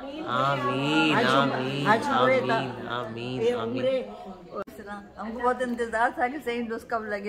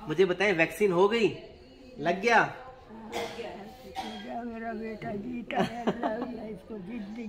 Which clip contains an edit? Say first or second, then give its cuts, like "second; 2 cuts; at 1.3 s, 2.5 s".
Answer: first; 1 cut; at 4.5 s